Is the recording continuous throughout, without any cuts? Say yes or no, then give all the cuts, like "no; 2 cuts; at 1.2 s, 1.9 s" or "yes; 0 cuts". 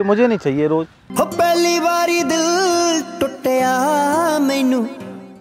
no; 1 cut; at 1.0 s